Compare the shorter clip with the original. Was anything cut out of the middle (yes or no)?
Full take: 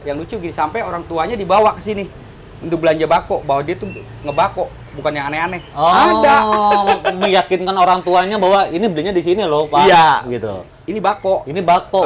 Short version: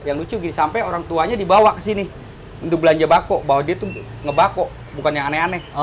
no